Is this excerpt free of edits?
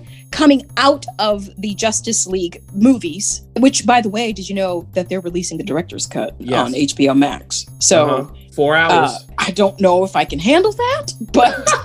no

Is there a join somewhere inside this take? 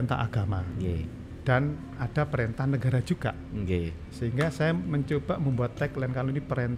no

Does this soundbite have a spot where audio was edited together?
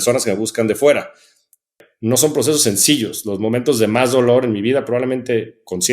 yes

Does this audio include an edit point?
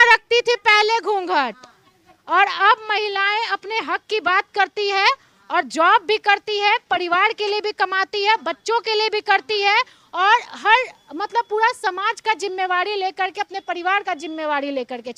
no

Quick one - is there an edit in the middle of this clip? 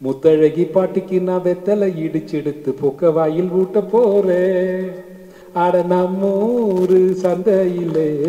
yes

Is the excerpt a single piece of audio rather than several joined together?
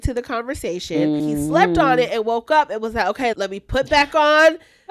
no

